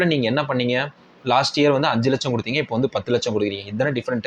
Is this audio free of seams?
yes; 0 cuts

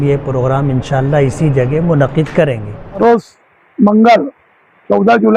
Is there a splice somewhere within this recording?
yes; 1 cut; at 3.0 s

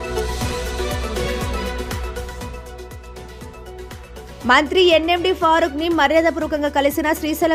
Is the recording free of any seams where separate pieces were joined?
yes; 0 cuts

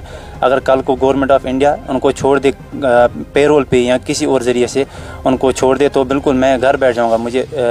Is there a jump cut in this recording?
no; 0 cuts

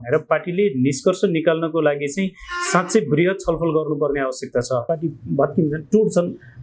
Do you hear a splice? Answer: yes; 1 cut; at 4.8 s

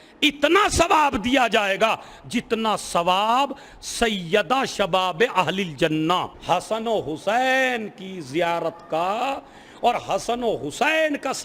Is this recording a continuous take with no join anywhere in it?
no; 1 cut; at 6.3 s

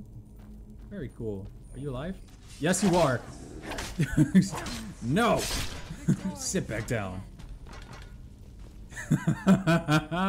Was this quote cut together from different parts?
no; 0 cuts

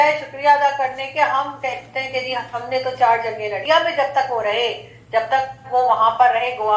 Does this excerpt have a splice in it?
yes; 1 cut; at 3.6 s

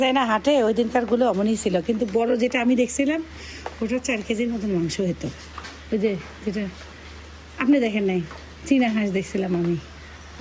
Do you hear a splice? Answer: no; 0 cuts

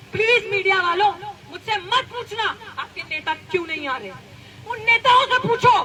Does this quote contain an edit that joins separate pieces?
no; 0 cuts

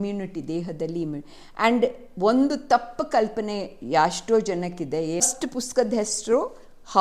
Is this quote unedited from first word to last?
no; 1 cut; at 5.3 s

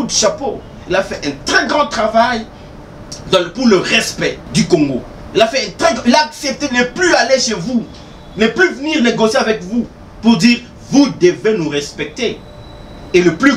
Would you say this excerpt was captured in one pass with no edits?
yes; 0 cuts

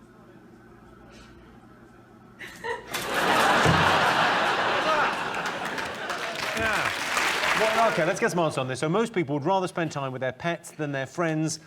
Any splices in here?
yes; 1 cut; at 7.5 s

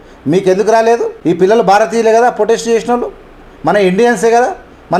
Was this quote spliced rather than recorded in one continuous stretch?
no; 0 cuts

